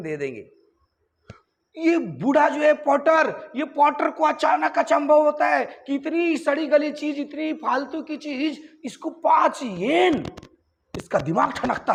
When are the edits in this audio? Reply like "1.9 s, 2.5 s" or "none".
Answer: none